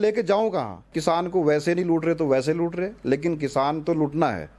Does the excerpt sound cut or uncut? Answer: cut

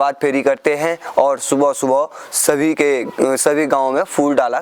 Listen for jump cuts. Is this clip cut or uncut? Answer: uncut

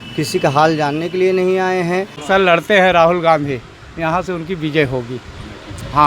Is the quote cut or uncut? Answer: cut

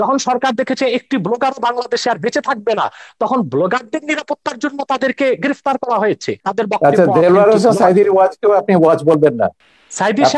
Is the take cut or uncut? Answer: cut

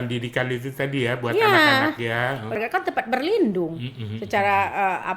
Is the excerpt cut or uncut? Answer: cut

